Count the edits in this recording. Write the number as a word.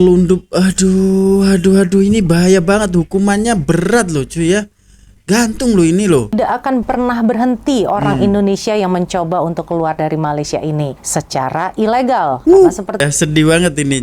two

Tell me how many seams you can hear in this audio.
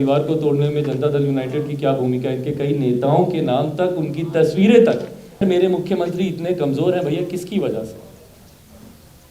one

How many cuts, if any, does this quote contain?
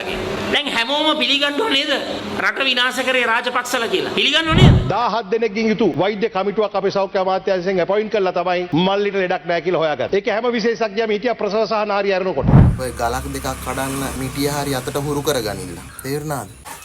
six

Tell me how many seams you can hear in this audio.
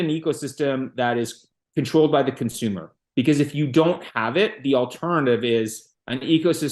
one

